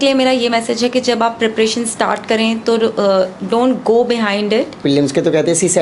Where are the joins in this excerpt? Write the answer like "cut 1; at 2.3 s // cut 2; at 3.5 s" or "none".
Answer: cut 1; at 4.8 s